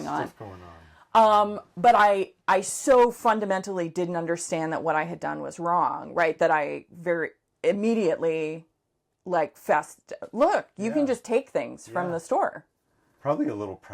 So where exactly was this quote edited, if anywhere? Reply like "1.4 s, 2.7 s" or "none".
none